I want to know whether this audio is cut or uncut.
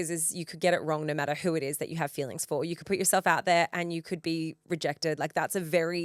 uncut